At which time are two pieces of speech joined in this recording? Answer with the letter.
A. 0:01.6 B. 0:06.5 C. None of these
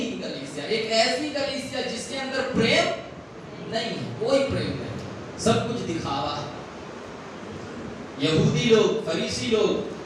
C